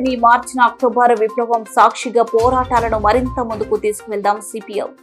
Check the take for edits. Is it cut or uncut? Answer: uncut